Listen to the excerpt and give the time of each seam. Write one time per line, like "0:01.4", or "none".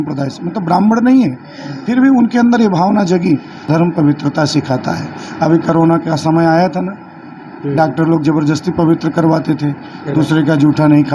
0:03.6